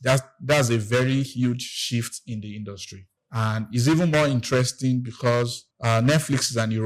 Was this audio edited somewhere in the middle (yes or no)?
yes